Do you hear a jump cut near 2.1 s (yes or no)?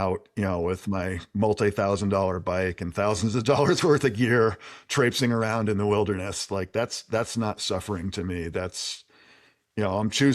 no